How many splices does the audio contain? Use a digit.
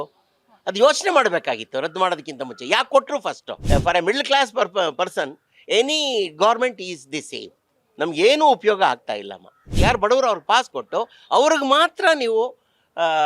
2